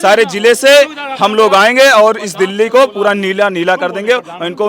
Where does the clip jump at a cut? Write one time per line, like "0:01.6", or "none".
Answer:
none